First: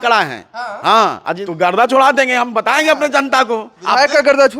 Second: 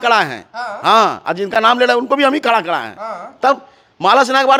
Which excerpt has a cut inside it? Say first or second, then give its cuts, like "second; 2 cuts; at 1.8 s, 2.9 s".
first; 1 cut; at 1.4 s